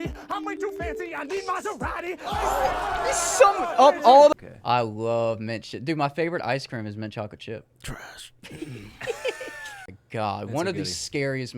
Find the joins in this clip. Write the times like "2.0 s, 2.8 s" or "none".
4.3 s, 10.0 s